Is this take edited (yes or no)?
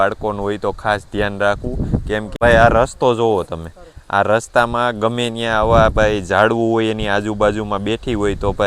no